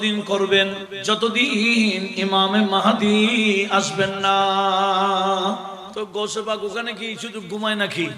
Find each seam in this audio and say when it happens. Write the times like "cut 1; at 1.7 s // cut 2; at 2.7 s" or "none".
cut 1; at 0.9 s // cut 2; at 5.8 s